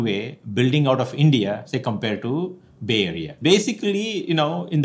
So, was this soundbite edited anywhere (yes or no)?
yes